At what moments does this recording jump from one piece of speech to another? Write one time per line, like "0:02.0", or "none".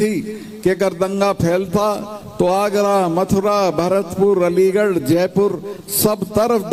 none